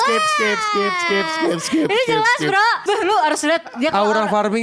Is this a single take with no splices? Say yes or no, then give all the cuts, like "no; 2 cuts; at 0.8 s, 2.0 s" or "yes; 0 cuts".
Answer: no; 1 cut; at 2.8 s